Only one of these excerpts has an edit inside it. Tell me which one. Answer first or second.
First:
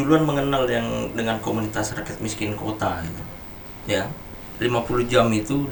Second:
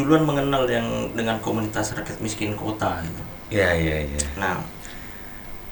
first